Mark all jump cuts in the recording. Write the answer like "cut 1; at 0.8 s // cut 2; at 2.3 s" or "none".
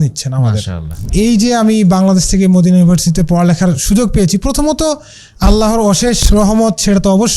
cut 1; at 1.1 s